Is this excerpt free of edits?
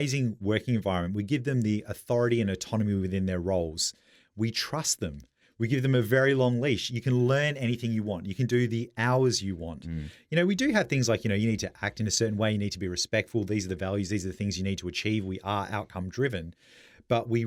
yes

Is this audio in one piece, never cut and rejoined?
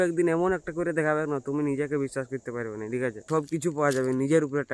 no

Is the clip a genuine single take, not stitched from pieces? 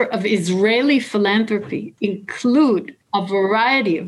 no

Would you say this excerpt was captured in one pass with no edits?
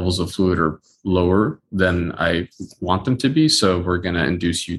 yes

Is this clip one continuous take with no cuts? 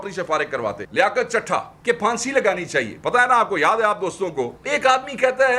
no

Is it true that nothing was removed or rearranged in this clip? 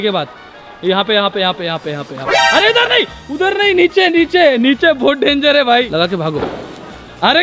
no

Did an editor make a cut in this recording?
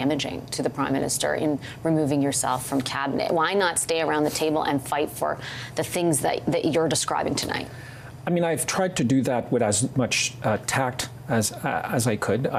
no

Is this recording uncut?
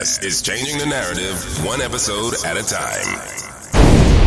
yes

